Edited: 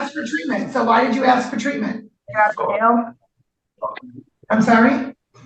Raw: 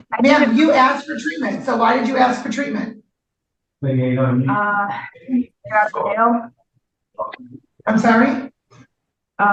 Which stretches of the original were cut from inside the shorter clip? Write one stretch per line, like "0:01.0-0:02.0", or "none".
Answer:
0:03.1-0:05.6